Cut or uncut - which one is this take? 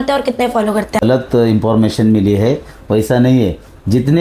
cut